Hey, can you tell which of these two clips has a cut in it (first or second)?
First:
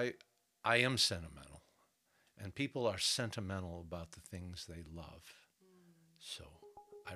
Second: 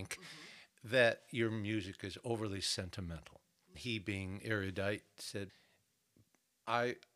second